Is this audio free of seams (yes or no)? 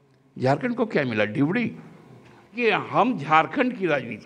no